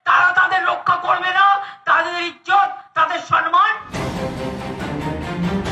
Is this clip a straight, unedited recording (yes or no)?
no